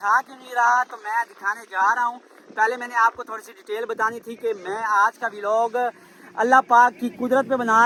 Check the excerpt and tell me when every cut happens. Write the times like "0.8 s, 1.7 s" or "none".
none